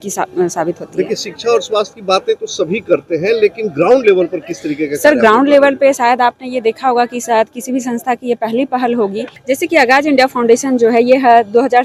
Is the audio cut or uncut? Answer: uncut